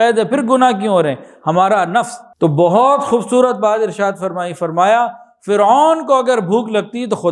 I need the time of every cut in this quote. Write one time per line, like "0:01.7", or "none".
0:02.2